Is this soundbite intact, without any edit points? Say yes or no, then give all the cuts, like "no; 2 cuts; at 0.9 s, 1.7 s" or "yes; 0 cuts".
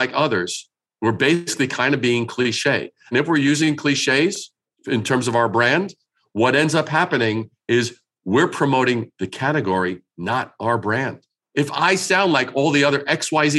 yes; 0 cuts